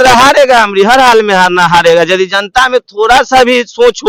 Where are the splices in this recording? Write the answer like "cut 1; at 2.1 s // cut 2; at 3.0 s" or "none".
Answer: none